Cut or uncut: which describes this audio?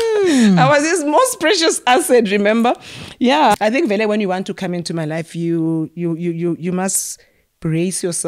cut